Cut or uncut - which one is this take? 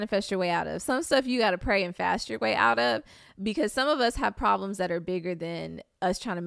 uncut